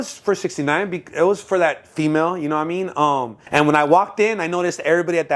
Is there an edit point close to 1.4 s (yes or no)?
no